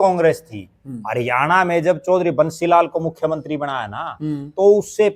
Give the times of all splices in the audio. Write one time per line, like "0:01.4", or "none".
none